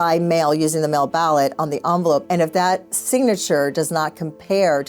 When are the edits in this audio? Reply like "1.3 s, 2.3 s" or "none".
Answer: 2.2 s